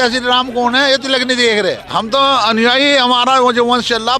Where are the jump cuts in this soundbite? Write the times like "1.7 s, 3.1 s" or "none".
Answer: none